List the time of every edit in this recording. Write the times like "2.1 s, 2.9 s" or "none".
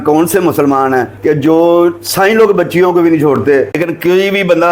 3.8 s